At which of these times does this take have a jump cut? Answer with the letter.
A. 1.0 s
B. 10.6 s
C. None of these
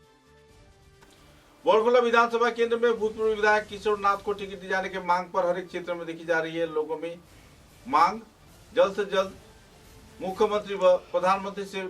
A